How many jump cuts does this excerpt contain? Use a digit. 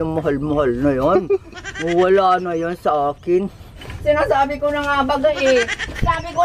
1